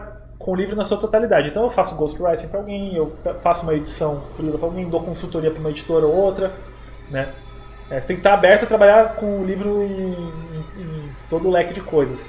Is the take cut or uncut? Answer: uncut